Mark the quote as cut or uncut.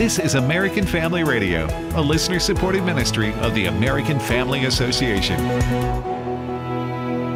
uncut